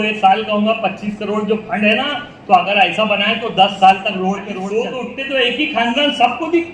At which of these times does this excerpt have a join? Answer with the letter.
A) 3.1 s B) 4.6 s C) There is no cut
B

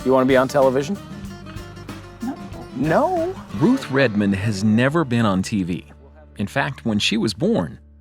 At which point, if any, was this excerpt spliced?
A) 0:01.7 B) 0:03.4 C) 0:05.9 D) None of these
B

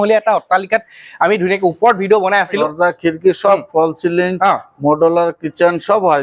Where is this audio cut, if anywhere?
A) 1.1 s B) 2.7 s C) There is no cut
B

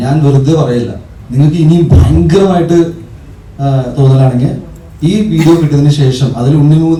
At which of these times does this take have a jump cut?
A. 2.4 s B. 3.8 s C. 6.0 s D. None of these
D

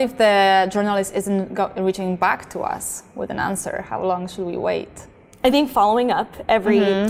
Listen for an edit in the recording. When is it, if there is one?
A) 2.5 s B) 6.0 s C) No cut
C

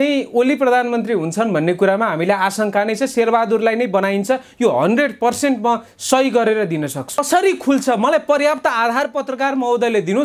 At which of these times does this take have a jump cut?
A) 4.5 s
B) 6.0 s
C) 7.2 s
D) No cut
C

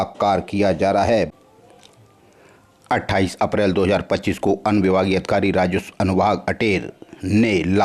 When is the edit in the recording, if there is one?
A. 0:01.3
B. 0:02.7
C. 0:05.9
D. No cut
A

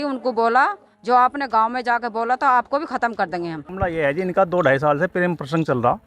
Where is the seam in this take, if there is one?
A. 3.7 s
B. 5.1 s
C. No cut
A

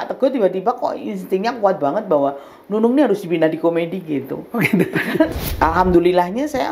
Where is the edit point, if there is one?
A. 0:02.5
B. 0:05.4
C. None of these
B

